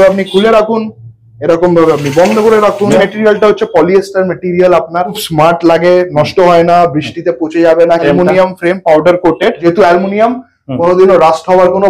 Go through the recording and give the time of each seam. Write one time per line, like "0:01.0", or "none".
0:03.0
0:05.2
0:08.0
0:09.6